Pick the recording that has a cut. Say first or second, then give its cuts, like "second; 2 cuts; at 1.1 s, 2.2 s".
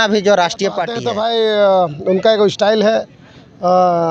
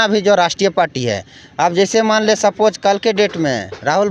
first; 1 cut; at 1.0 s